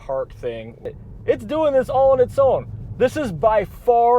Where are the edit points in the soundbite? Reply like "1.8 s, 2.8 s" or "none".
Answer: 0.9 s